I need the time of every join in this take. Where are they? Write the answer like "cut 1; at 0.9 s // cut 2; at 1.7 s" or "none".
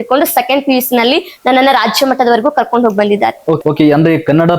cut 1; at 3.6 s